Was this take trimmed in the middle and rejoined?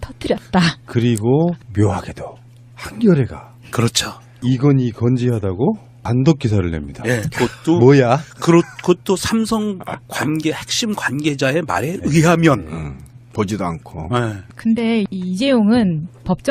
no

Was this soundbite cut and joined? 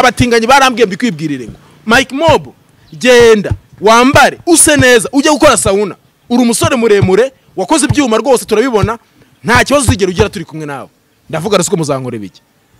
no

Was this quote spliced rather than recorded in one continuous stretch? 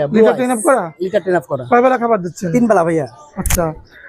no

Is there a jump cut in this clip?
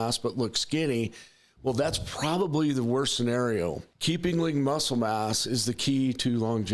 yes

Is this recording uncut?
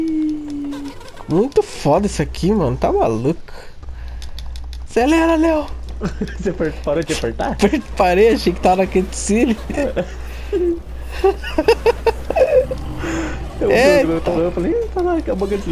yes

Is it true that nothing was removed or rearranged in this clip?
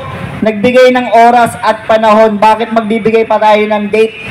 yes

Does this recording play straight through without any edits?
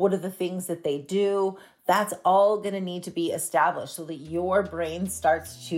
yes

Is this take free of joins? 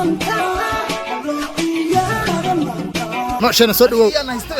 no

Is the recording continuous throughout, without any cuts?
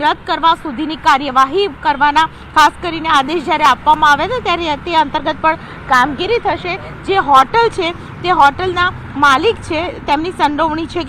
no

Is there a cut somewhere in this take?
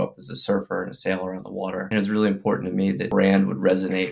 yes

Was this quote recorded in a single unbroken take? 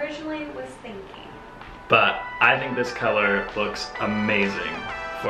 yes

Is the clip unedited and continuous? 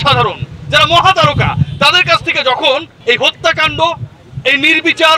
no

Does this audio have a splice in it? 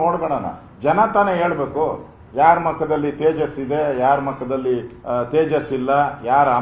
no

